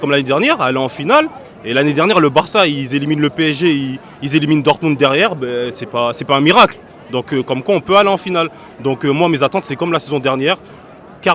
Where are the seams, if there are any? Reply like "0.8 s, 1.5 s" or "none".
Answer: none